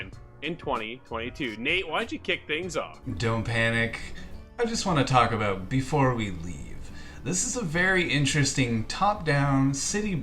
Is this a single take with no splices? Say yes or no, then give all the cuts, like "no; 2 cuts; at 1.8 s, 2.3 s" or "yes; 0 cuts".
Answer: no; 1 cut; at 3.0 s